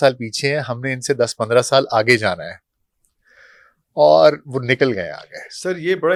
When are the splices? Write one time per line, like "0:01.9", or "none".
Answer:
none